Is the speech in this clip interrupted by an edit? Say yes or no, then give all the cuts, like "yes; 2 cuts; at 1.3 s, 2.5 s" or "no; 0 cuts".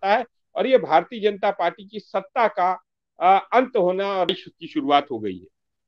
yes; 1 cut; at 4.3 s